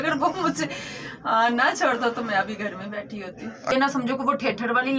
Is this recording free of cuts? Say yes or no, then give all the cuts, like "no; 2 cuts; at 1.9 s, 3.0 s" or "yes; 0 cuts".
no; 1 cut; at 3.7 s